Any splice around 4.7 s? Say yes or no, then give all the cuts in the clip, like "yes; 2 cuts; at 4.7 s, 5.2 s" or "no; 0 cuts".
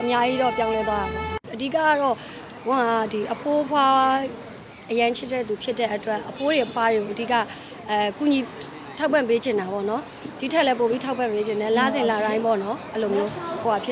no; 1 cut; at 1.4 s